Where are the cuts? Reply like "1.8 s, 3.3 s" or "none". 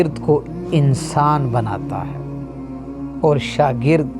1.8 s, 3.2 s